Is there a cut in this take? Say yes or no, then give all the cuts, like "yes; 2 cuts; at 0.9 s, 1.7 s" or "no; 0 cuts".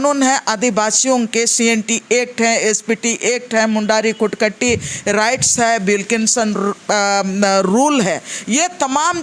no; 0 cuts